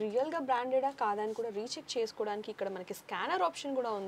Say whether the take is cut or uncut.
uncut